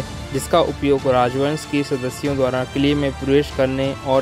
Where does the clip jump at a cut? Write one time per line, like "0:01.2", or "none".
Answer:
none